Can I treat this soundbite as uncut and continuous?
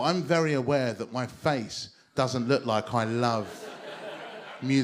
yes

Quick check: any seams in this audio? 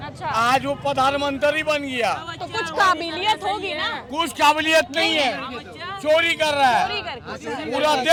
no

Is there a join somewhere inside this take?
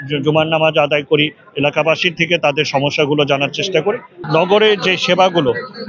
yes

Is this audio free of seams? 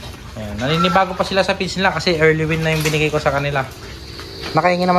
no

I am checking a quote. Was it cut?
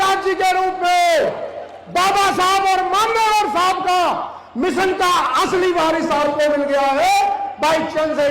no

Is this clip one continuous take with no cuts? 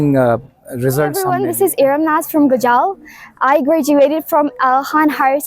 no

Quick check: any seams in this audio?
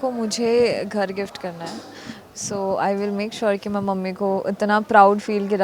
no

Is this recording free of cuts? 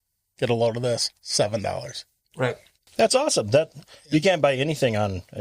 no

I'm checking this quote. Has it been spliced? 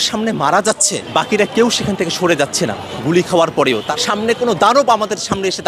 yes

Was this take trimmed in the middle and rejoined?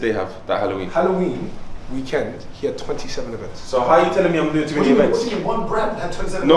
no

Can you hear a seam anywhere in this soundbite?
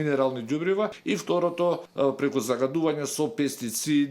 yes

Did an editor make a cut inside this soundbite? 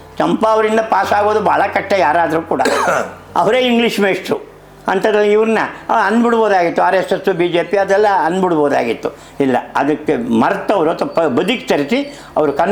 no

